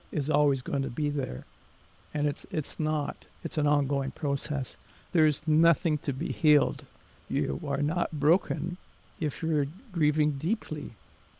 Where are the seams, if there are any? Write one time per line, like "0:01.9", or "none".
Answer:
0:03.2
0:05.1
0:07.3